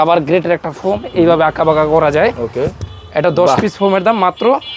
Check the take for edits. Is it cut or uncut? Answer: uncut